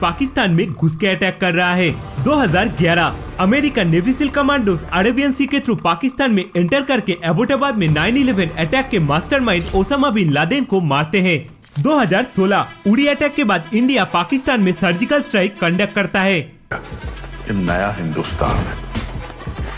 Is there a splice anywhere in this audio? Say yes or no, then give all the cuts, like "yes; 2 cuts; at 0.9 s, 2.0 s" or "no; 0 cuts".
no; 0 cuts